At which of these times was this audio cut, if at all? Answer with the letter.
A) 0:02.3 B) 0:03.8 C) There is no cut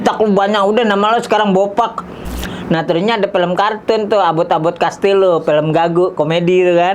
A